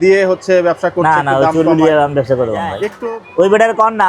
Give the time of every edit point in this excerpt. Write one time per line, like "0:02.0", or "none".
0:02.9